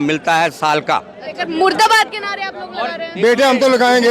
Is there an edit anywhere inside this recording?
yes; 1 cut; at 1.3 s

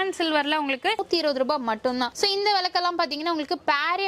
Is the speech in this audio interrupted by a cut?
yes; 1 cut; at 1.0 s

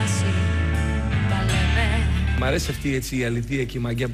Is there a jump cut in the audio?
yes; 1 cut; at 2.1 s

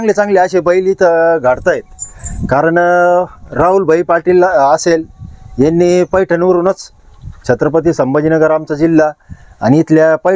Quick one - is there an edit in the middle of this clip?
no; 0 cuts

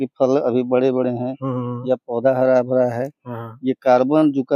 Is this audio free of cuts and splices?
yes; 0 cuts

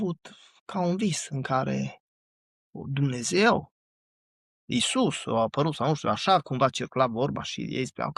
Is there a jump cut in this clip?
no; 0 cuts

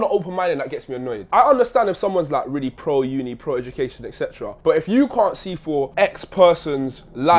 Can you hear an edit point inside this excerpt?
yes; 3 cuts; at 1.2 s, 4.5 s, 5.9 s

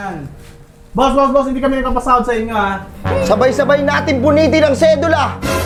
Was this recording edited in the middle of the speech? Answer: no; 0 cuts

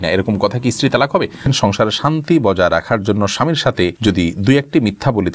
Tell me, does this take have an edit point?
yes; 2 cuts; at 1.5 s, 4.0 s

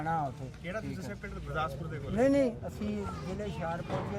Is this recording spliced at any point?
no; 0 cuts

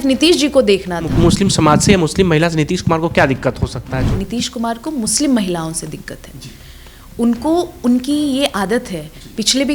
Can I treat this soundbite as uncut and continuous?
no; 2 cuts; at 1.1 s, 3.9 s

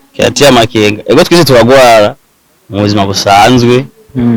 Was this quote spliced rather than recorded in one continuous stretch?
no; 0 cuts

